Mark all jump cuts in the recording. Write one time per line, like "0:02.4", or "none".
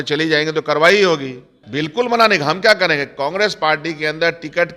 0:01.6